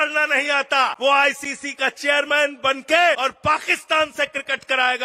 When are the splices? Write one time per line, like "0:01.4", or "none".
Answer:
0:00.9
0:03.2